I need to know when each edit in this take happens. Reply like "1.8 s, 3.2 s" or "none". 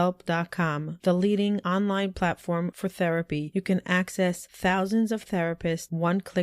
none